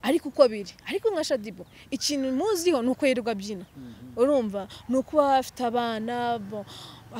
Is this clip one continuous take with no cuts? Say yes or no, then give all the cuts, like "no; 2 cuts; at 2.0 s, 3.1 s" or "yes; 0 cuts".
yes; 0 cuts